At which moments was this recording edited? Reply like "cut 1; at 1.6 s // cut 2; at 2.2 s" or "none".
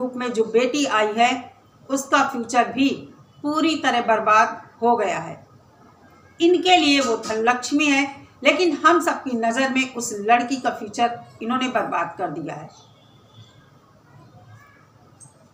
none